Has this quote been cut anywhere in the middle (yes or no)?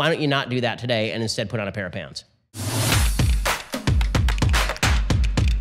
yes